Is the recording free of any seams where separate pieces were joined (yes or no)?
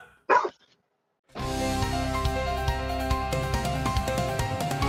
yes